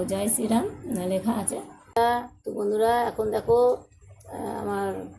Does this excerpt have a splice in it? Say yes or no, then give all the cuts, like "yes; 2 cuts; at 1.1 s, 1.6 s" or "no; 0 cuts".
yes; 1 cut; at 1.8 s